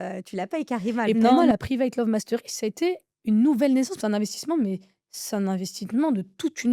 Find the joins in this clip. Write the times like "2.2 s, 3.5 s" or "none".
1.3 s, 3.9 s